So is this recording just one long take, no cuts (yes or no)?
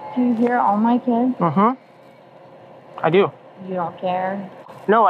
yes